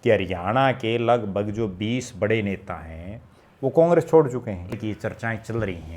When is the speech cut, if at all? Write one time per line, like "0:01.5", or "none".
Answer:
0:04.8